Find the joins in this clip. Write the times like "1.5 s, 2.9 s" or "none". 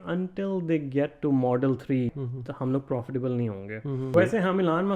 2.1 s, 4.1 s

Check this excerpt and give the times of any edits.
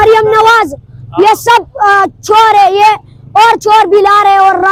none

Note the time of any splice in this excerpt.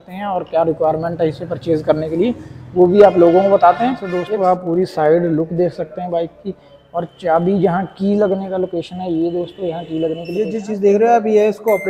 4.1 s, 10.4 s

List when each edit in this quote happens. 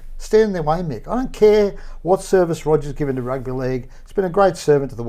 none

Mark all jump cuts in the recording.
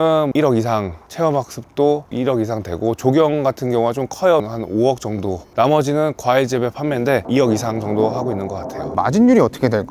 4.4 s, 7.2 s, 9.0 s

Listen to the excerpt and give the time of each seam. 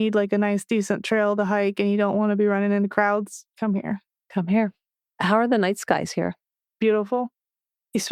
none

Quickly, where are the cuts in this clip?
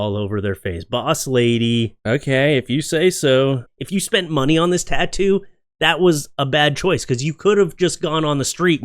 3.7 s

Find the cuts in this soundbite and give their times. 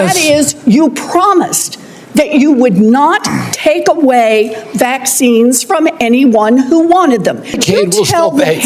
7.6 s

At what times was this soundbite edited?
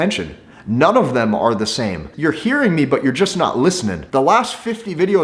2.1 s, 4.0 s

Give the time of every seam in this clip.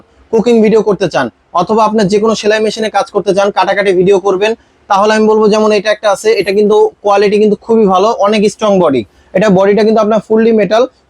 none

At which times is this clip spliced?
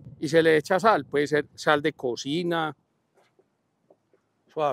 2.9 s

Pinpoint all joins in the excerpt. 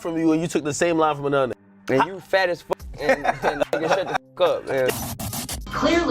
1.7 s, 5.1 s

